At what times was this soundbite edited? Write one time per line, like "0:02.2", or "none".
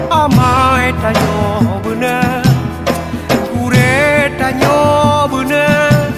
none